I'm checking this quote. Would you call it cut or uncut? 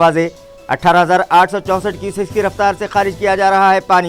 uncut